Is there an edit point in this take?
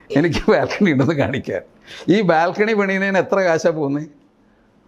no; 0 cuts

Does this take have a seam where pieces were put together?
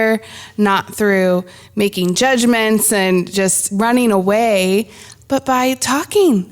yes; 1 cut; at 3.6 s

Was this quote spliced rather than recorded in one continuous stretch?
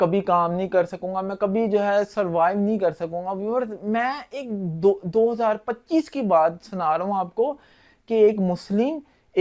no; 0 cuts

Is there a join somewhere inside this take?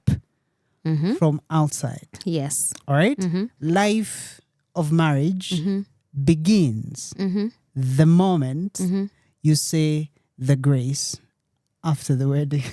yes; 1 cut; at 3.5 s

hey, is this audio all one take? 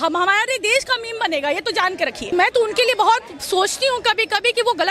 no; 1 cut; at 2.3 s

